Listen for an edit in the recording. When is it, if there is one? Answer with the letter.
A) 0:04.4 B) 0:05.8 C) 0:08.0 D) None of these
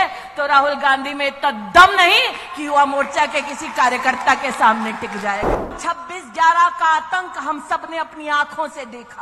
B